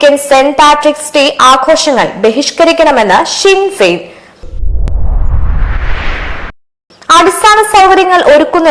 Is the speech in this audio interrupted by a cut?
no; 0 cuts

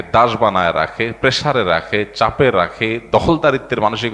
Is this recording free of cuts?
yes; 0 cuts

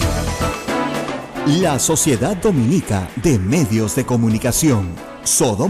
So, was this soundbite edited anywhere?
yes; 1 cut; at 1.3 s

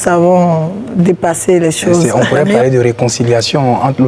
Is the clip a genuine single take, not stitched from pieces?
no; 1 cut; at 2.1 s

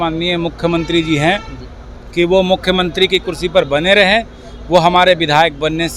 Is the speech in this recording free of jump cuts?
yes; 0 cuts

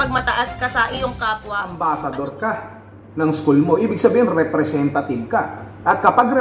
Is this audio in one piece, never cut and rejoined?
no; 1 cut; at 1.6 s

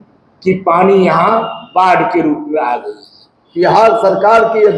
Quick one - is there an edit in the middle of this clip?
yes; 1 cut; at 3.4 s

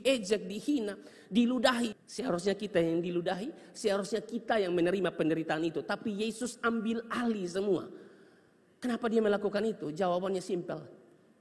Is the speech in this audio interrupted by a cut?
yes; 1 cut; at 1.9 s

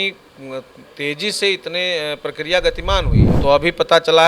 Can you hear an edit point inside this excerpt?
yes; 1 cut; at 3.2 s

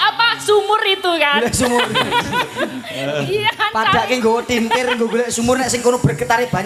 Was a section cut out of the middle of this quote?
no; 0 cuts

